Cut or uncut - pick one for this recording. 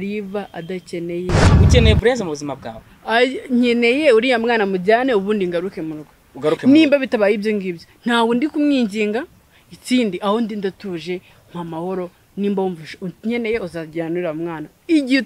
cut